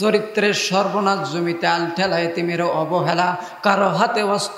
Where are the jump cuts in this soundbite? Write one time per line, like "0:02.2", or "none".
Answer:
none